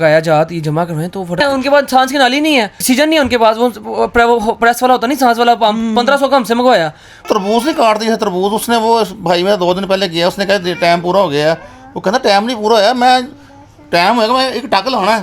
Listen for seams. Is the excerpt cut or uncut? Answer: cut